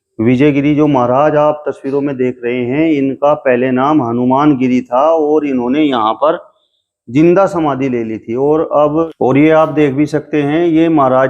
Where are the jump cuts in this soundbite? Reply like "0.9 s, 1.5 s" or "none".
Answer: 9.1 s